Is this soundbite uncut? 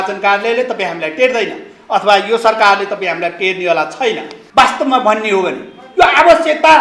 no; 1 cut; at 4.3 s

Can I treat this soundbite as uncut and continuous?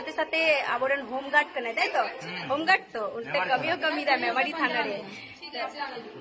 yes; 0 cuts

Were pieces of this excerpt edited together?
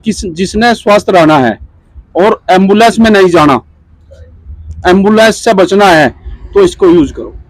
no; 0 cuts

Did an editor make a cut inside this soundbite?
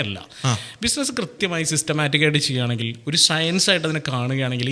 no; 0 cuts

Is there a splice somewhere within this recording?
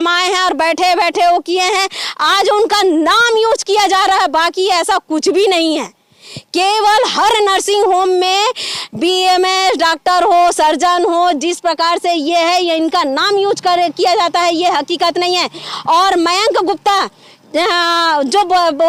no; 0 cuts

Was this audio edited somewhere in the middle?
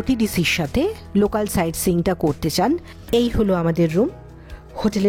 yes; 1 cut; at 2.9 s

